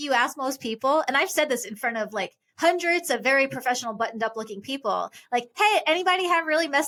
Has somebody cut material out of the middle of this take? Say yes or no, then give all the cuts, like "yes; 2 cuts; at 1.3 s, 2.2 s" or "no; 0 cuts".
no; 0 cuts